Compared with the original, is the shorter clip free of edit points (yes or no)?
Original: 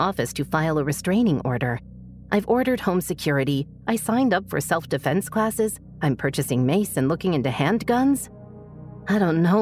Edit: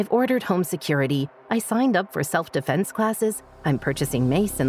yes